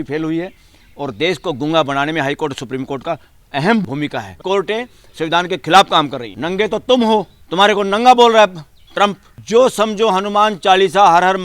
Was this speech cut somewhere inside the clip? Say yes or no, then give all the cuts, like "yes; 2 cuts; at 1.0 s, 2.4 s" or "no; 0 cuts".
yes; 4 cuts; at 4.4 s, 6.3 s, 7.4 s, 9.3 s